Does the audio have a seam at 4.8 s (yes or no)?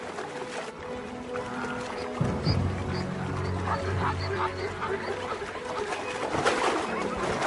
yes